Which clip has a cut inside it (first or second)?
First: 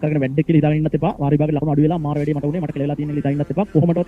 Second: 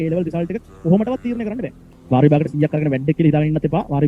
second